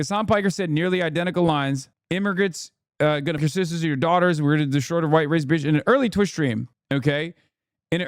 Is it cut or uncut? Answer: cut